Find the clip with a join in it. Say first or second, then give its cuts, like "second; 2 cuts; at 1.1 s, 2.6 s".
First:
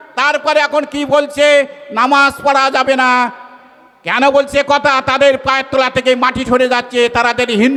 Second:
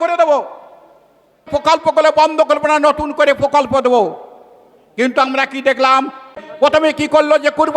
second; 2 cuts; at 1.4 s, 6.4 s